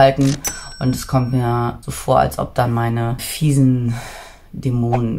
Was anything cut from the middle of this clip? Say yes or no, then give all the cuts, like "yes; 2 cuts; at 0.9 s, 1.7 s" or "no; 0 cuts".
yes; 2 cuts; at 1.9 s, 3.3 s